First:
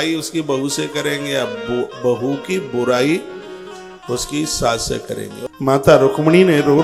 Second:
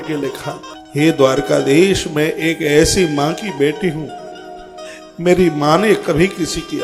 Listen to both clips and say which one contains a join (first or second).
first